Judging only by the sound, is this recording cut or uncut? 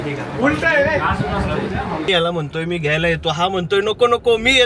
cut